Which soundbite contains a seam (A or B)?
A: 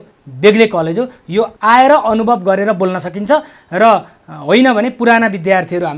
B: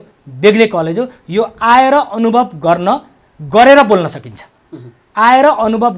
A